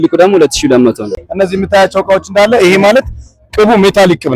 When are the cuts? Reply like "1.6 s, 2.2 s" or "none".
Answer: 1.1 s